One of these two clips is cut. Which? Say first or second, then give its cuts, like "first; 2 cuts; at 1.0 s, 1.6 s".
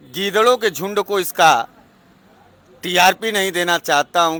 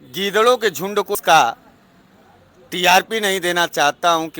second; 1 cut; at 1.1 s